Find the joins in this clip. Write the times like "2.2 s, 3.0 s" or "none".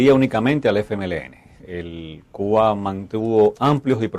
2.4 s